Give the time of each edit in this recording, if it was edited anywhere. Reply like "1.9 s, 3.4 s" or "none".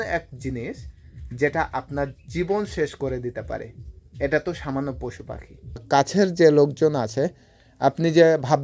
5.8 s